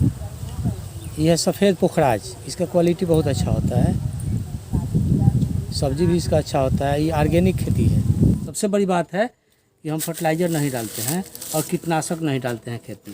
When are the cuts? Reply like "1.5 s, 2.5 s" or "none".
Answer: 8.5 s